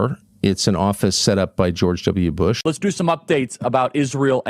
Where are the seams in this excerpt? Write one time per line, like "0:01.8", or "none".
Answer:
0:02.6